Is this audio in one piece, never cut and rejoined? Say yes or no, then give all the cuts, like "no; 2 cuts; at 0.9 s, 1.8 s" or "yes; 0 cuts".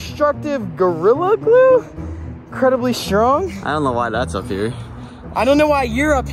yes; 0 cuts